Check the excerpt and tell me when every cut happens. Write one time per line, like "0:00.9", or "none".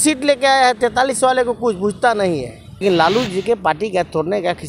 0:02.8